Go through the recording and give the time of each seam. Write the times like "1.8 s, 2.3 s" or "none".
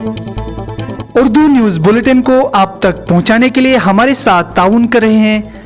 1.0 s